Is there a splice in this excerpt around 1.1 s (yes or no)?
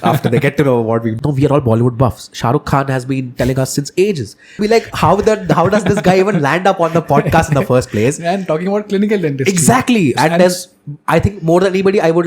yes